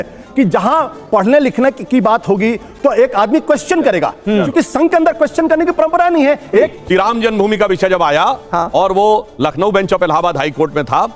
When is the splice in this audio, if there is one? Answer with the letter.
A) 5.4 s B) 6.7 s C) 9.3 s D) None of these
B